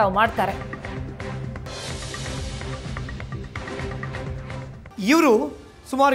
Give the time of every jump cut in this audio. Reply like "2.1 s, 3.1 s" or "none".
4.8 s